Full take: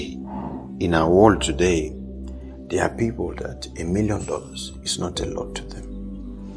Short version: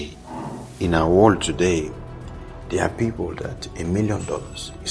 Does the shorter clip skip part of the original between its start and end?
no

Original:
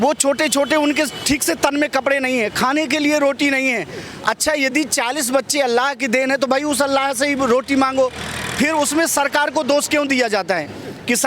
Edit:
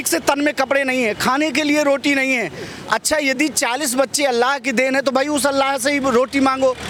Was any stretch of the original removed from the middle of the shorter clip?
no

